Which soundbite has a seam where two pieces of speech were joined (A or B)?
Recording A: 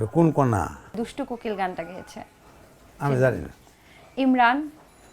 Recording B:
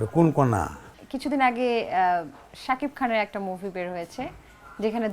A